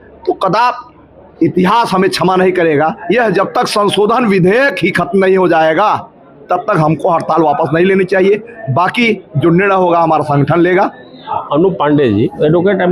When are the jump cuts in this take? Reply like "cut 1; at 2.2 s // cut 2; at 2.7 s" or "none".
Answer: none

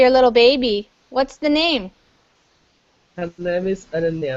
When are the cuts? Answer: cut 1; at 2.4 s

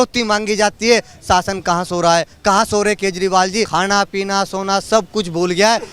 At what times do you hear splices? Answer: cut 1; at 3.7 s

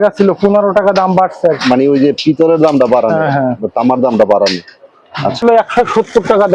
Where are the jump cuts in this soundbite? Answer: cut 1; at 5.4 s

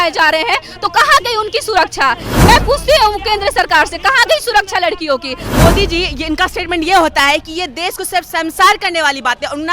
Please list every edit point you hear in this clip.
cut 1; at 2.3 s // cut 2; at 5.4 s

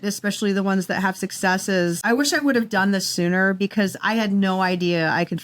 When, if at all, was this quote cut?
cut 1; at 2.0 s

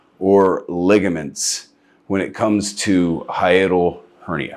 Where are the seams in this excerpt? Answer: none

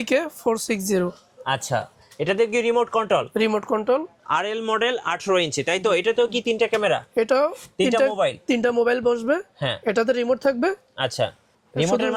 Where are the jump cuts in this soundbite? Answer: cut 1; at 4.2 s

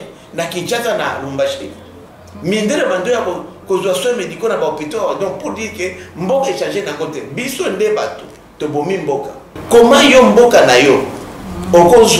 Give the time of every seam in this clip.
cut 1; at 9.5 s

